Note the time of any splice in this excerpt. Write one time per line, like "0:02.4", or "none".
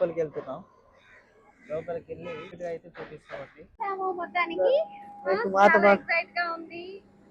0:02.5
0:03.8